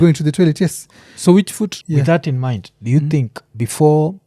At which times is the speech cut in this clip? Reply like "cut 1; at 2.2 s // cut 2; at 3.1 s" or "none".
cut 1; at 1.8 s

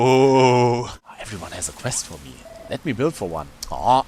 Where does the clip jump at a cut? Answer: cut 1; at 0.9 s

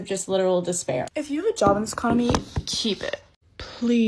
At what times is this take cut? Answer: cut 1; at 1.1 s

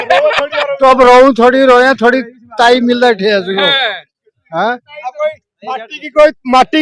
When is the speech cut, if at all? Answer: none

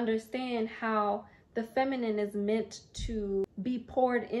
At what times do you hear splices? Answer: cut 1; at 3.5 s

